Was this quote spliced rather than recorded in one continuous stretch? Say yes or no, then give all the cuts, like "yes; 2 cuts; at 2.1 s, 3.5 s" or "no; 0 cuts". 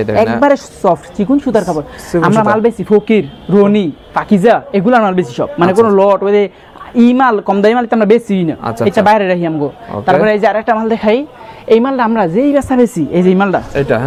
no; 0 cuts